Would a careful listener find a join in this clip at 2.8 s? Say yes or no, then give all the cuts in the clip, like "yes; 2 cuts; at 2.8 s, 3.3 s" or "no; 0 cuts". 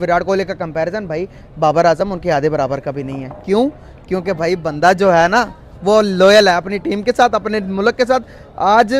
no; 0 cuts